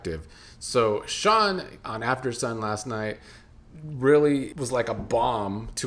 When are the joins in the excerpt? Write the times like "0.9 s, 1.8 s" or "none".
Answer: 4.5 s